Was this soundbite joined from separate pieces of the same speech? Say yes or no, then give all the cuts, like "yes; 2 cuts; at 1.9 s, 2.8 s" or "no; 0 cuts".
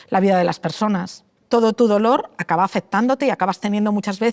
yes; 1 cut; at 1.3 s